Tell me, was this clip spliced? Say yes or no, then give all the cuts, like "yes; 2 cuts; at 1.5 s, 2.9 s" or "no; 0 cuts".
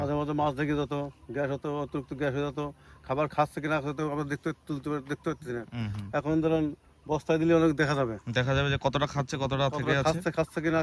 no; 0 cuts